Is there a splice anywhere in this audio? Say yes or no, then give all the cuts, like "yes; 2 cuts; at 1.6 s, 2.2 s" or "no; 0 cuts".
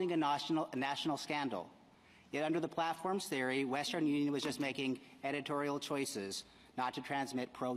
yes; 2 cuts; at 1.8 s, 7.0 s